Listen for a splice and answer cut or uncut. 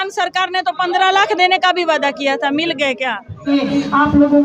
cut